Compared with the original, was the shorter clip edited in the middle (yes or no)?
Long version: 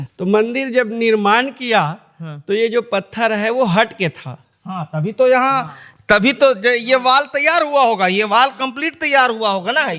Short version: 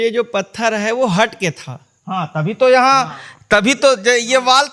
no